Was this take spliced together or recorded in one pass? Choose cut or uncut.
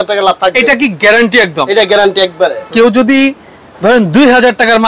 cut